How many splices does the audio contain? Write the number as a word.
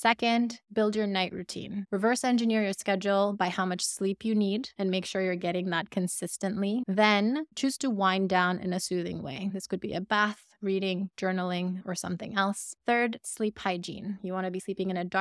two